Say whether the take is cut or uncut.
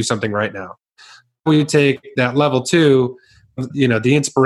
uncut